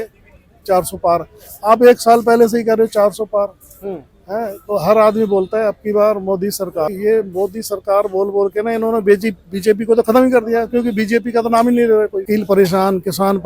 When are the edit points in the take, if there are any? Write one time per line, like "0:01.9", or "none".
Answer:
0:06.9
0:12.2